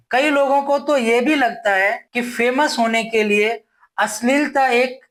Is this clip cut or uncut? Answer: uncut